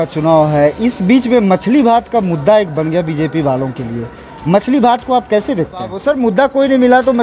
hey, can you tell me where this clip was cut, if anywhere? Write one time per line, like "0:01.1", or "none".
0:06.0